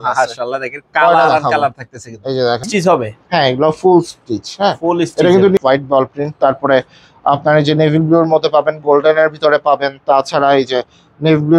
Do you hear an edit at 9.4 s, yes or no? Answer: no